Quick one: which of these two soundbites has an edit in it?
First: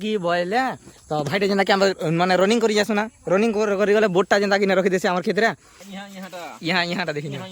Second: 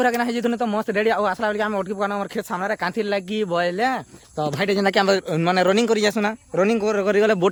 first; 1 cut; at 5.8 s

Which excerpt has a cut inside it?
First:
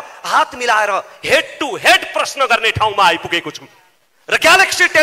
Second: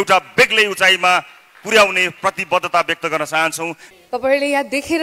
second; 1 cut; at 3.8 s

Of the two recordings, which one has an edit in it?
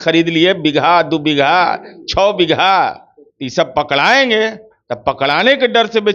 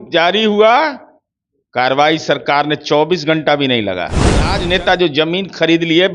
second; 1 cut; at 4.5 s

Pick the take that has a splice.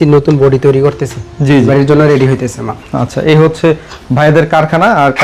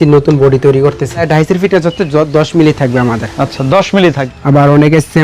second; 2 cuts; at 1.2 s, 4.3 s

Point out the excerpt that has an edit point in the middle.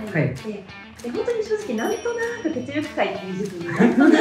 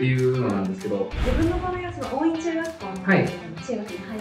second; 1 cut; at 1.2 s

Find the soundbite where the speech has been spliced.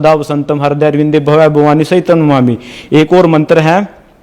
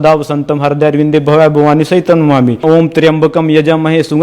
second; 1 cut; at 2.6 s

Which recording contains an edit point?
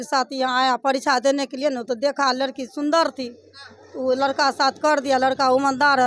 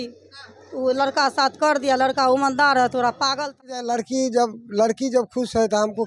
second; 1 cut; at 3.8 s

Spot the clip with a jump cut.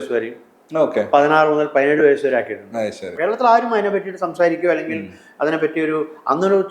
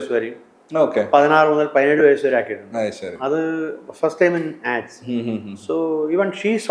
first; 1 cut; at 3.1 s

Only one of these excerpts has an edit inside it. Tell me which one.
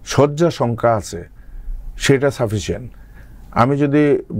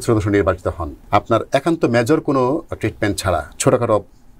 second; 2 cuts; at 0.9 s, 3.5 s

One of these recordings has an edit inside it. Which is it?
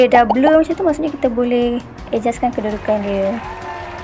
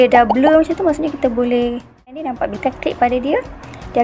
second; 1 cut; at 2.1 s

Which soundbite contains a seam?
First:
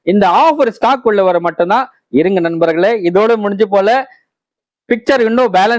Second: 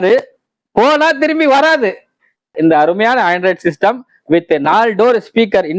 second; 1 cut; at 2.5 s

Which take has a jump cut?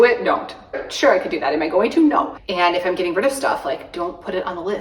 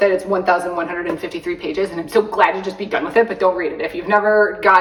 first; 2 cuts; at 0.8 s, 2.4 s

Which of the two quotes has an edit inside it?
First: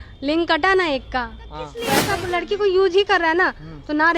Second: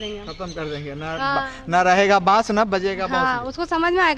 first; 1 cut; at 1.9 s

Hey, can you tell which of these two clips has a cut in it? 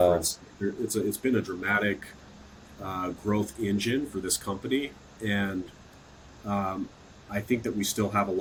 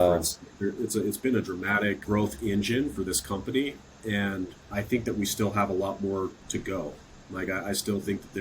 second; 3 cuts; at 2.0 s, 4.6 s, 6.4 s

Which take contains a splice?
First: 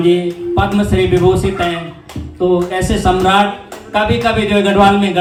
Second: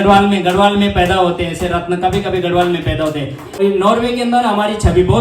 second; 1 cut; at 3.6 s

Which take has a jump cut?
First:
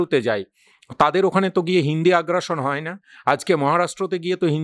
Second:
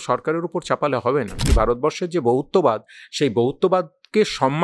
second; 1 cut; at 1.5 s

